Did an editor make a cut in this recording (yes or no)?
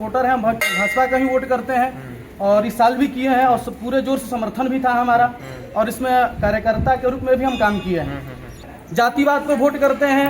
yes